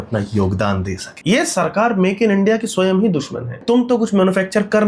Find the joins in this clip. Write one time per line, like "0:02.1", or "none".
0:01.1
0:03.6